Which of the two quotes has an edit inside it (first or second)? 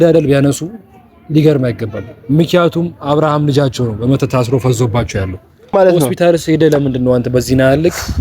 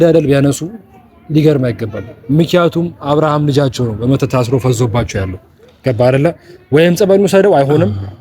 first